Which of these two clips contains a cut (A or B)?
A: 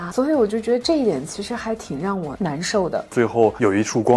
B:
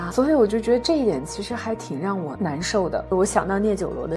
A